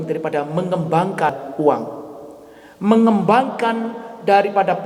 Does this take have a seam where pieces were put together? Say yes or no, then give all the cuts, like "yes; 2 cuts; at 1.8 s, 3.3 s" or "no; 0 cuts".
no; 0 cuts